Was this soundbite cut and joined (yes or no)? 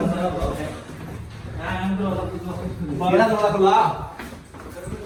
no